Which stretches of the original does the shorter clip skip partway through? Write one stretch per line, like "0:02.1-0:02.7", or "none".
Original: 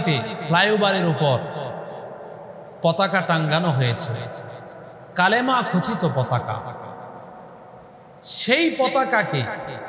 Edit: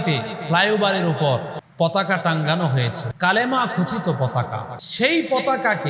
0:01.6-0:02.6
0:04.1-0:05.0
0:06.7-0:08.3